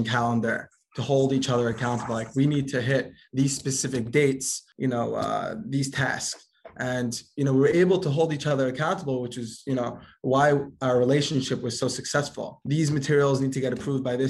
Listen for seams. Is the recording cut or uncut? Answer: cut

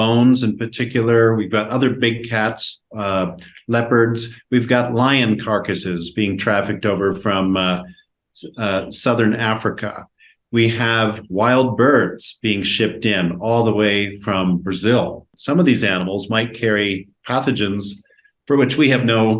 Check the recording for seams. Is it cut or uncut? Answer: cut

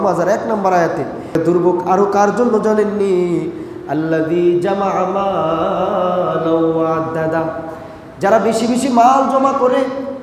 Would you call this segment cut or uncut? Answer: cut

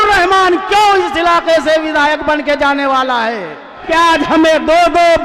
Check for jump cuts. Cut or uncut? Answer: cut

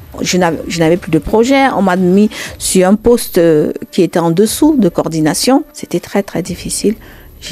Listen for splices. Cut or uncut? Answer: cut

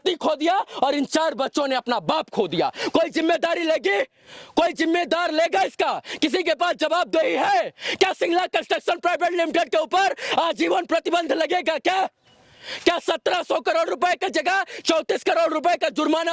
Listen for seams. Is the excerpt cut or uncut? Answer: uncut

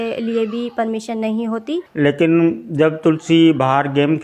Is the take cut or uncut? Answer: cut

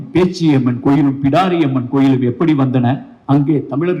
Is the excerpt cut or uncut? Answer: cut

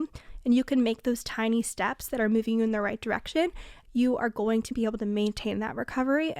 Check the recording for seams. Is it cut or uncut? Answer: cut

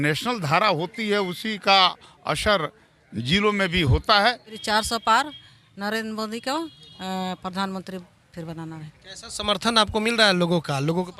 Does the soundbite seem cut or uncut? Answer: cut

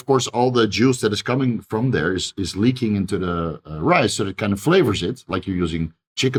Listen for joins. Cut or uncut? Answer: uncut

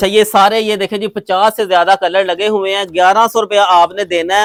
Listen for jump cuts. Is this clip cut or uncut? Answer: uncut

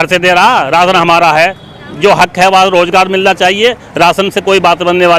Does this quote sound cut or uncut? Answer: uncut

